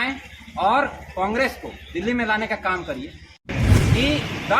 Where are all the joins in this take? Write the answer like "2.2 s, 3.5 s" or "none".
3.5 s